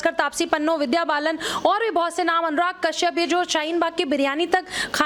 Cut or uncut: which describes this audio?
uncut